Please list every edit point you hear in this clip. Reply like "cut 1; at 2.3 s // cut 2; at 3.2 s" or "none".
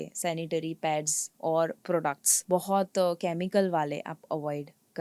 cut 1; at 2.3 s